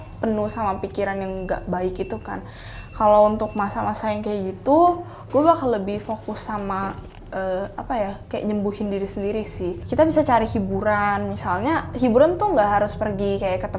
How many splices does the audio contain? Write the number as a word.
one